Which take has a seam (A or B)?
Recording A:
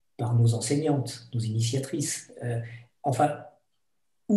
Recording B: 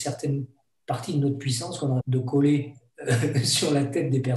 B